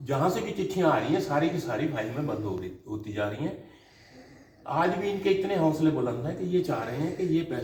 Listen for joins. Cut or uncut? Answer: uncut